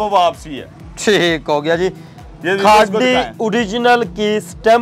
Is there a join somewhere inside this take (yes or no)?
no